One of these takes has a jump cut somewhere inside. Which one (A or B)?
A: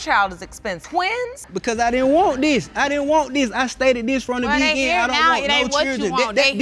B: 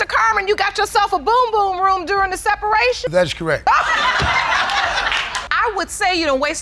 B